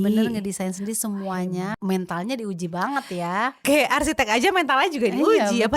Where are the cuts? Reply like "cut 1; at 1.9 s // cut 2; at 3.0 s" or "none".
cut 1; at 1.7 s // cut 2; at 3.6 s